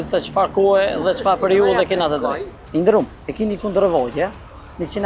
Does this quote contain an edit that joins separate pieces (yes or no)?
yes